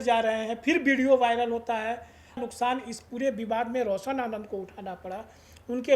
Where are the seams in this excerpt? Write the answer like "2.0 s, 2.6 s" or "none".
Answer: 2.4 s